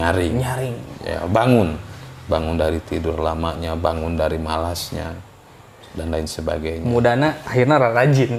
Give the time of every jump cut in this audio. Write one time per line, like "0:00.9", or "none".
none